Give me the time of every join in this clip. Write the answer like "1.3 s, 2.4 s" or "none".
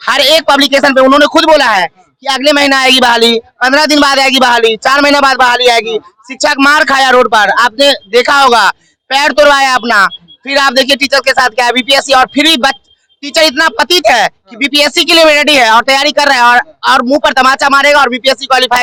none